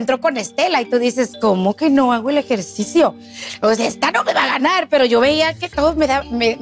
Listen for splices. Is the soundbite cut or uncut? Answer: uncut